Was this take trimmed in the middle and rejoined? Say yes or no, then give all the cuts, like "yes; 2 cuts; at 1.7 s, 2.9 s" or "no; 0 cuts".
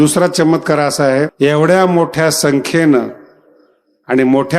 yes; 1 cut; at 1.3 s